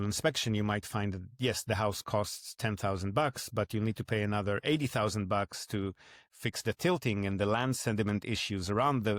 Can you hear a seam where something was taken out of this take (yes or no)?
no